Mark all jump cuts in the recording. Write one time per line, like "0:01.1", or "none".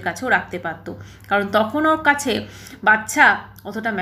none